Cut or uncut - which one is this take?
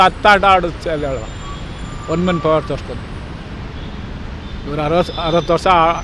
uncut